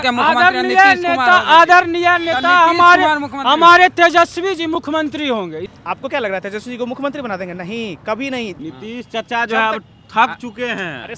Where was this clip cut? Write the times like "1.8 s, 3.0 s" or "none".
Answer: 5.6 s, 8.6 s